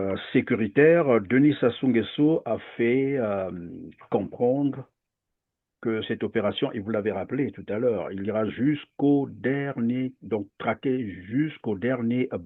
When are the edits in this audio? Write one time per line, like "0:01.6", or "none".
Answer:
none